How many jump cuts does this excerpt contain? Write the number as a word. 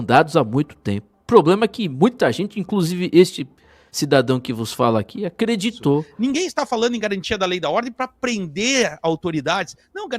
one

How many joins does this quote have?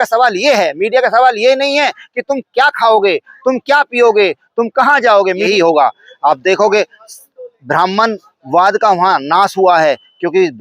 one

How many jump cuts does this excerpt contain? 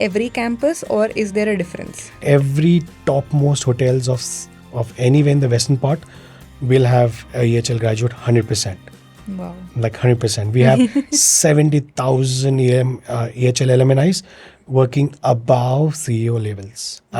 one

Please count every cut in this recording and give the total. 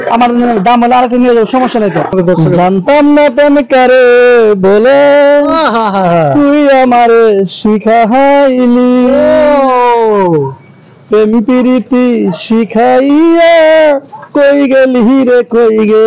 one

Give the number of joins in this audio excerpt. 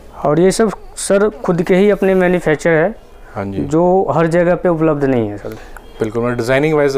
zero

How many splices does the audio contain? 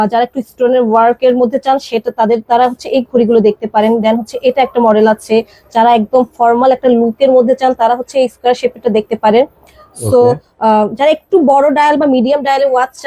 zero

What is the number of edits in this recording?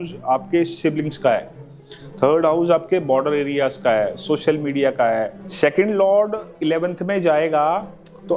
one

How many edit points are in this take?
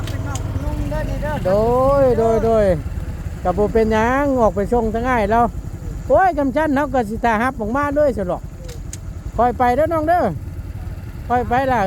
zero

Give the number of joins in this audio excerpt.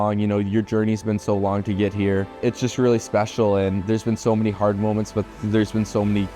one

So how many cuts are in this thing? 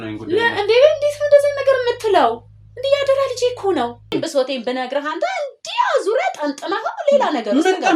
one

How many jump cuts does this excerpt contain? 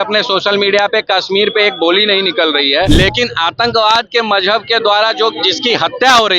one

